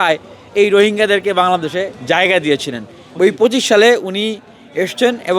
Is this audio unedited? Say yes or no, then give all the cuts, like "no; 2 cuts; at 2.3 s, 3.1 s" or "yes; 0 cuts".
no; 1 cut; at 3.0 s